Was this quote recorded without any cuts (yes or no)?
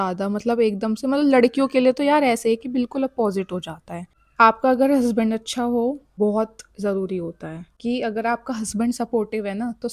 yes